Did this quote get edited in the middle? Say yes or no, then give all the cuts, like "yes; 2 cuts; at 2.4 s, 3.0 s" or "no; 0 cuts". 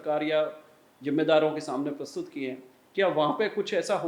no; 0 cuts